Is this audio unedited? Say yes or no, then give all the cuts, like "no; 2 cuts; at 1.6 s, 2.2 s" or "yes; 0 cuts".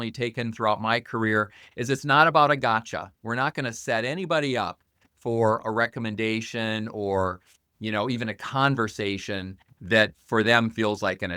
no; 2 cuts; at 5.6 s, 10.2 s